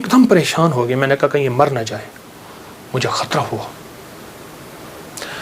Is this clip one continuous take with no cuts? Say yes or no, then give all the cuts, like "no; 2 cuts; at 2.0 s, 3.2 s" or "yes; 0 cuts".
yes; 0 cuts